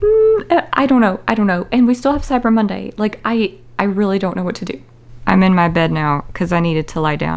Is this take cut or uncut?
cut